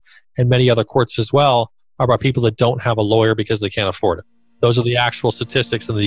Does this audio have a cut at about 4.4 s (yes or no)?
yes